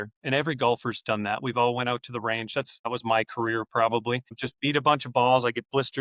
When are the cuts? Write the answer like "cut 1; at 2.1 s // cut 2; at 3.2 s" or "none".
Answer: cut 1; at 2.9 s // cut 2; at 4.4 s